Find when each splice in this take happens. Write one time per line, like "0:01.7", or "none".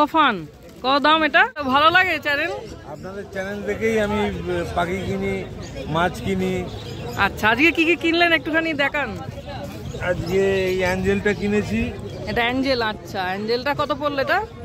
0:01.6

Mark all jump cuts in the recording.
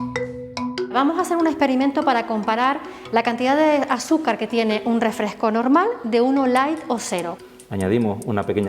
0:00.9
0:07.3

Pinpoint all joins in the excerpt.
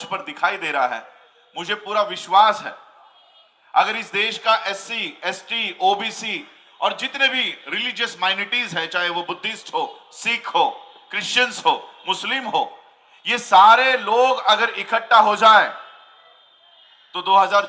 none

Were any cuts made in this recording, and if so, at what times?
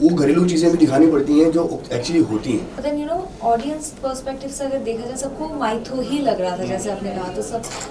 0:02.7

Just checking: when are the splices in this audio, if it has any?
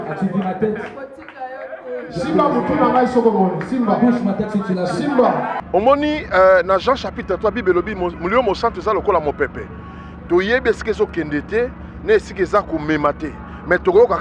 0:05.6

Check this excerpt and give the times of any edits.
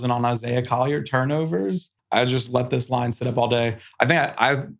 0:01.9

